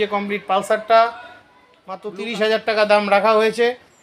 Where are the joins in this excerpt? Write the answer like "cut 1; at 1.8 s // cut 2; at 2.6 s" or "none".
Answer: cut 1; at 2.0 s